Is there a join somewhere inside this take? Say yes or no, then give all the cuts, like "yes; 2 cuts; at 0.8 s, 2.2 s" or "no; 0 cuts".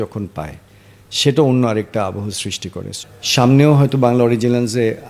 yes; 1 cut; at 2.9 s